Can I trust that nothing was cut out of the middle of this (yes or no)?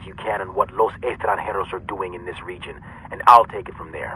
yes